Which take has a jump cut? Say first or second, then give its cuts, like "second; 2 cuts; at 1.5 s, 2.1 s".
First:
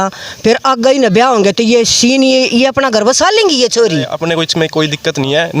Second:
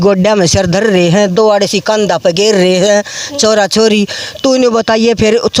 first; 1 cut; at 4.1 s